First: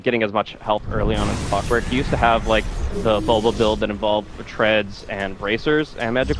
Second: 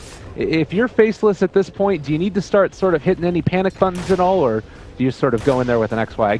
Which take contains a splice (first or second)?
second